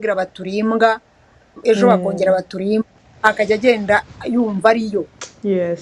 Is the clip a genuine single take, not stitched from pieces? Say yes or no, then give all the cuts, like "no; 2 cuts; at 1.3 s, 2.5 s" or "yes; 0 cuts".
yes; 0 cuts